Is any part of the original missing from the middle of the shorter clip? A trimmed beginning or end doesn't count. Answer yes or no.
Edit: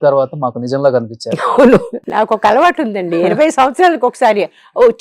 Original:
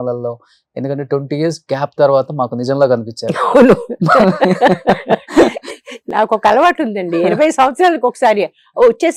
yes